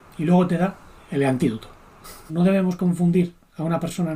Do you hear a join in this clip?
yes; 1 cut; at 2.3 s

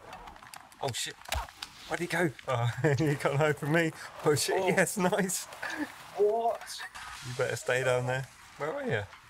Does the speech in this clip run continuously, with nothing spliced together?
no; 1 cut; at 6.7 s

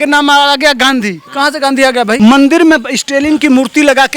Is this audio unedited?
no; 1 cut; at 2.2 s

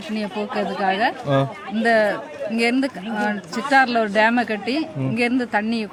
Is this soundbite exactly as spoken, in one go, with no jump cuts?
yes; 0 cuts

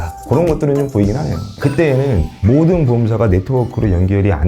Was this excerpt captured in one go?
no; 1 cut; at 1.4 s

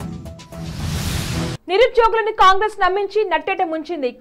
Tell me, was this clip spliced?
no; 0 cuts

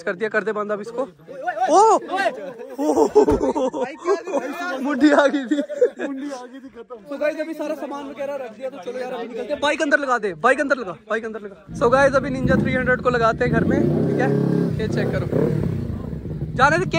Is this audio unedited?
yes; 0 cuts

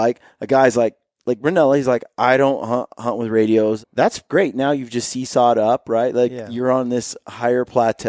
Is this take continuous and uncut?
no; 1 cut; at 3.8 s

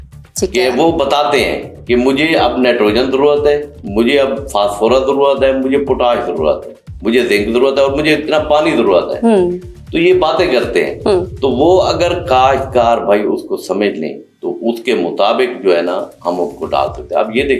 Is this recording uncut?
yes; 0 cuts

